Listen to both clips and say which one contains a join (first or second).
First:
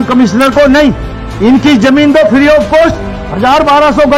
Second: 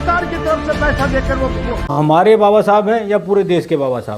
second